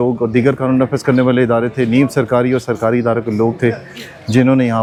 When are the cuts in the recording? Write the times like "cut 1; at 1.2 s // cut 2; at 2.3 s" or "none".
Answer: none